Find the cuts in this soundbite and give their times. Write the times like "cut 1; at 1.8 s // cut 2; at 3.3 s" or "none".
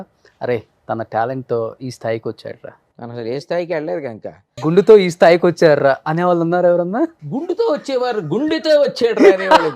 cut 1; at 3.3 s // cut 2; at 4.5 s // cut 3; at 7.2 s